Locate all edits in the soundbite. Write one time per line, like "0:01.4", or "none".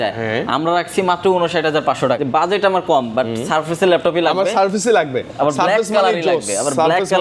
0:02.2